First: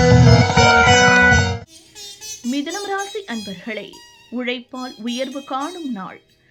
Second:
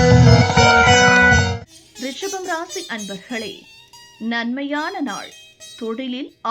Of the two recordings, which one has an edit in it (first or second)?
first